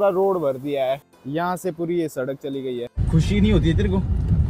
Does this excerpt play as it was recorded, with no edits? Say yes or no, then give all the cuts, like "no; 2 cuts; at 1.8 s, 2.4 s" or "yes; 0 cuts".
no; 2 cuts; at 1.1 s, 3.0 s